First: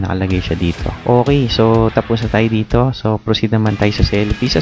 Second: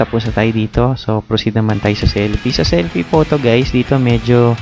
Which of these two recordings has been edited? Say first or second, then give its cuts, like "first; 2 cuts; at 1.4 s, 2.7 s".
first; 1 cut; at 0.9 s